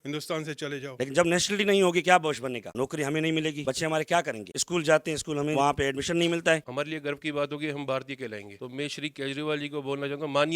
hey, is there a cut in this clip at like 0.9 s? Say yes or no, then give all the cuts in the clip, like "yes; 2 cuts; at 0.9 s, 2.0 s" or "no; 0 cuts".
yes; 4 cuts; at 0.9 s, 5.5 s, 6.7 s, 8.5 s